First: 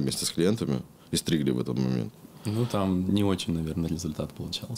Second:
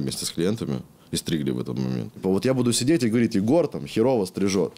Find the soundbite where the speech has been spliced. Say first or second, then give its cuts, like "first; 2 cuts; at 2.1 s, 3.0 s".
second; 1 cut; at 2.2 s